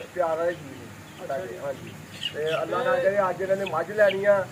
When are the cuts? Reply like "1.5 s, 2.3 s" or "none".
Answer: none